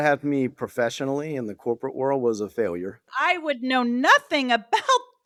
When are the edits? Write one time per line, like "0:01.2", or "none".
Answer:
none